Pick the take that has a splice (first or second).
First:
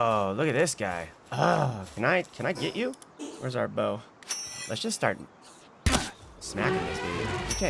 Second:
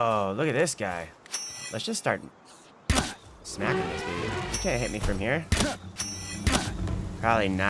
second